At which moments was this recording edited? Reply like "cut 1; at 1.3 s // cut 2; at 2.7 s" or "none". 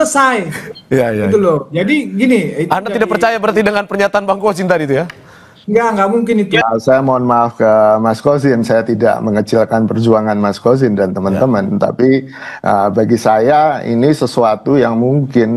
cut 1; at 6.6 s

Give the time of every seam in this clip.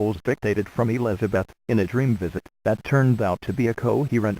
cut 1; at 2.4 s

